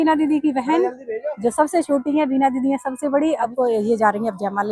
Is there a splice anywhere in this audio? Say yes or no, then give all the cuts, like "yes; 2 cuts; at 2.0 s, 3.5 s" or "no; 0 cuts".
yes; 1 cut; at 3.5 s